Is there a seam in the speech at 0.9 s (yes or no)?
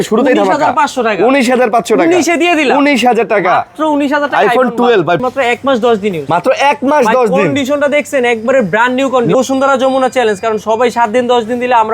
no